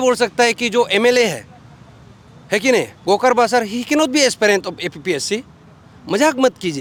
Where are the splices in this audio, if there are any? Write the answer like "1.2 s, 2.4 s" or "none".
none